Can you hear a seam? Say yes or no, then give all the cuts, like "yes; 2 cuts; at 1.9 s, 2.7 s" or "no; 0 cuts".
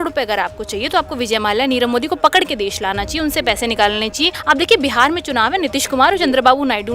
yes; 1 cut; at 4.3 s